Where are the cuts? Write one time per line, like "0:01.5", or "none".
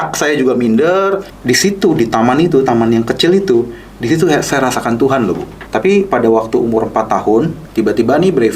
0:01.3
0:05.5
0:07.6